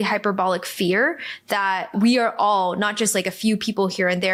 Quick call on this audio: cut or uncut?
uncut